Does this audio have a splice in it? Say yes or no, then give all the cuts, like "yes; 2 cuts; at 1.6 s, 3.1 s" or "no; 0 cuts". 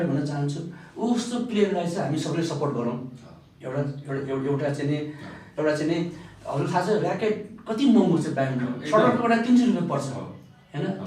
no; 0 cuts